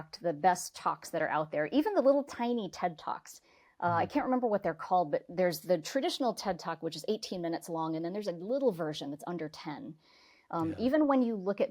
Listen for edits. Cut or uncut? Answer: uncut